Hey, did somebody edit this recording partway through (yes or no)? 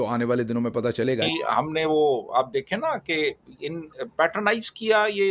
yes